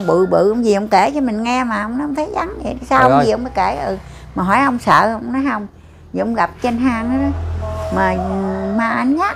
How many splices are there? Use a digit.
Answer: 0